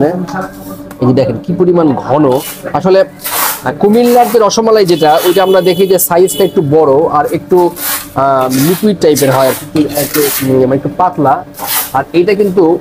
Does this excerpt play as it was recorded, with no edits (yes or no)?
yes